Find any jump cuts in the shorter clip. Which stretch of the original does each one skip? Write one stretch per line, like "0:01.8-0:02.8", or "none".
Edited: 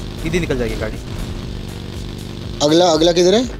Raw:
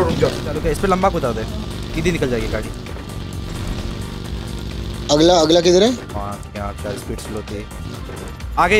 0:02.8-0:03.5